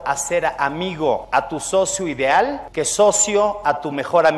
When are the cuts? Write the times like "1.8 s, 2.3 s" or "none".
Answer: 1.2 s, 2.6 s